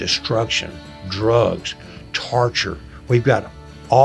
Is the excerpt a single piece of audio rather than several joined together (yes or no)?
yes